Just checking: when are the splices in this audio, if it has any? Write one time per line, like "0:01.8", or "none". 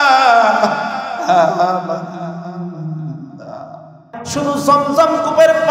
0:04.1